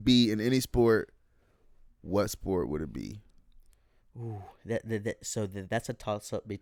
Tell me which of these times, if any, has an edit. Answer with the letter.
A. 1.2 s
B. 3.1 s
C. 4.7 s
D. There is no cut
D